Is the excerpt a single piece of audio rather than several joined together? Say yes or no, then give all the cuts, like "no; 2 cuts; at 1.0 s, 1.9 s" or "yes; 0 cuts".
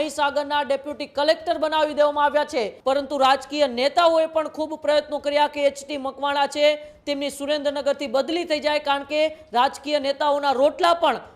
no; 1 cut; at 2.7 s